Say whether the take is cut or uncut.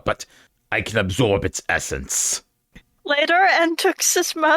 cut